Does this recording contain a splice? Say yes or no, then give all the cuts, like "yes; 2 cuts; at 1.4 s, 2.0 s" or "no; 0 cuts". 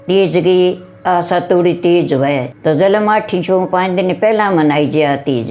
yes; 1 cut; at 2.5 s